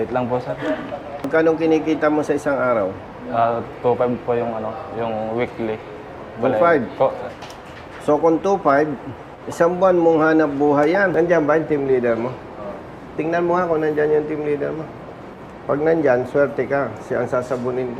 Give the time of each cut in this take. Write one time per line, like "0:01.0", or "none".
0:01.3
0:11.1